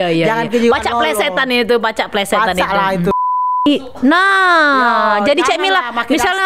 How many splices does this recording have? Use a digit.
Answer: 1